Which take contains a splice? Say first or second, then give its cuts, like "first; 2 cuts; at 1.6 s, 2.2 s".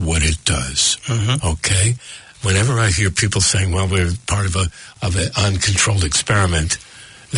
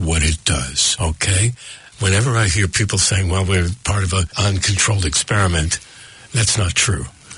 second; 2 cuts; at 1.0 s, 4.3 s